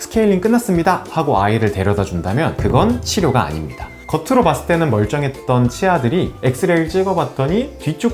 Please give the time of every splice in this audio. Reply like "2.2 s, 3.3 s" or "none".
4.0 s